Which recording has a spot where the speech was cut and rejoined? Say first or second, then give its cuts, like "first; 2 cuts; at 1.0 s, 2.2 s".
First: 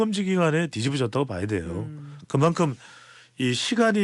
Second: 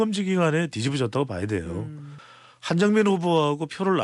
second; 1 cut; at 2.1 s